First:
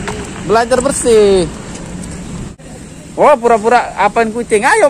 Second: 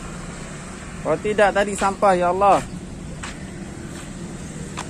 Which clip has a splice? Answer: first; 1 cut; at 2.6 s

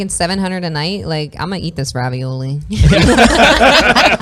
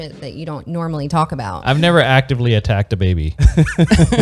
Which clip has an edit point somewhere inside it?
second; 1 cut; at 1.5 s

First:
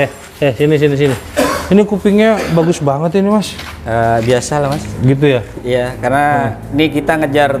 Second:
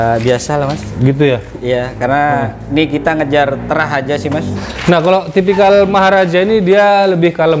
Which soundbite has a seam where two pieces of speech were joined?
second; 1 cut; at 4.5 s

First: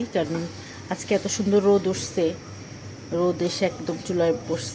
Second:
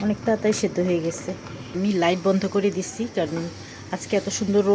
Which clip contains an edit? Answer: second; 1 cut; at 1.7 s

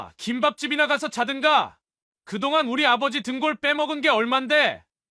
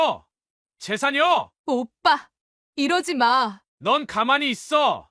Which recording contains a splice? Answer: second; 1 cut; at 3.6 s

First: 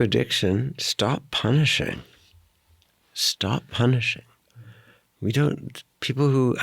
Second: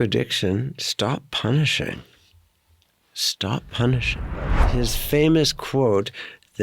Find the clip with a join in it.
second; 1 cut; at 4.6 s

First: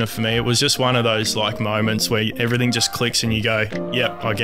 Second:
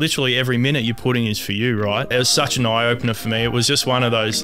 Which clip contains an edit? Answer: second; 1 cut; at 2.1 s

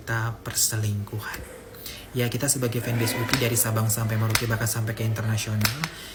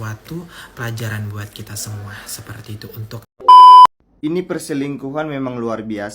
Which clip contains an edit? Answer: second; 2 cuts; at 3.3 s, 4.0 s

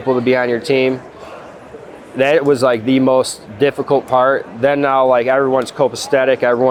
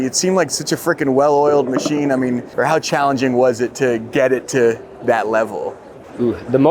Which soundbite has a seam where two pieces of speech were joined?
second; 1 cut; at 2.5 s

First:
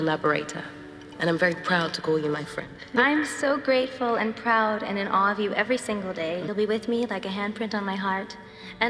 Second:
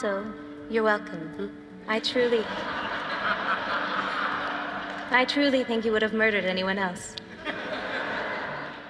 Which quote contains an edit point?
first; 2 cuts; at 2.8 s, 6.5 s

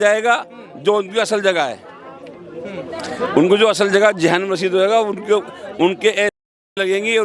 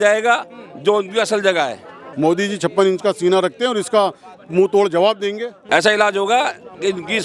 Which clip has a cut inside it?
second; 2 cuts; at 2.0 s, 5.5 s

